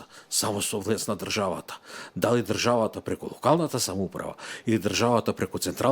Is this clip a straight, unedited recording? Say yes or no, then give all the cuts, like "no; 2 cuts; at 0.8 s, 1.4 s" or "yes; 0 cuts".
yes; 0 cuts